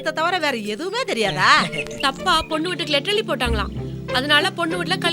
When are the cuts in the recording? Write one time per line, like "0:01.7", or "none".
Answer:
0:02.0